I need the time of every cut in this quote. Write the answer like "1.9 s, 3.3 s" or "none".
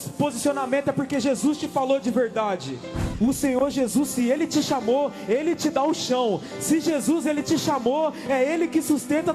3.0 s